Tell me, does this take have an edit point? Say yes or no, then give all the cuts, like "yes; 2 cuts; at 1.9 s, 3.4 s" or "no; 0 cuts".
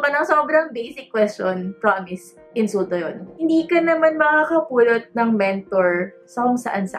yes; 1 cut; at 3.3 s